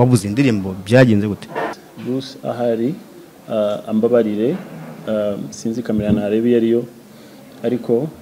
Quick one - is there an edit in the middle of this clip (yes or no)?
yes